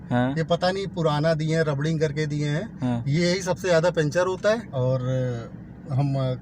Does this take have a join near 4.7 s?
yes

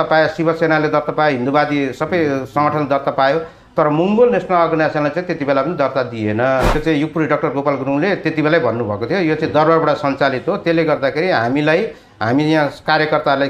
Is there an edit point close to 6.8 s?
yes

